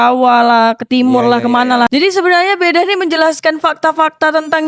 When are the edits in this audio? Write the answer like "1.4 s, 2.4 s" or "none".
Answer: 1.9 s